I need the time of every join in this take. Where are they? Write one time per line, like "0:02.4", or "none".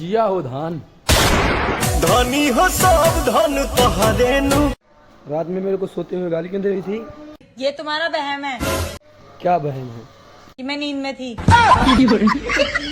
0:04.9